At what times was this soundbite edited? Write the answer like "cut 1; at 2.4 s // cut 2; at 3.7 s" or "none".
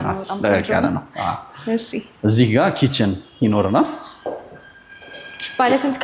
none